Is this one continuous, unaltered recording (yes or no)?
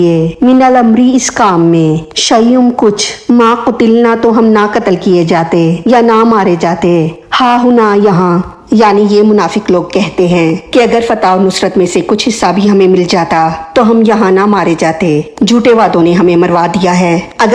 yes